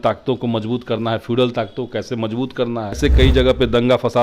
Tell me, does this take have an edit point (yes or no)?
yes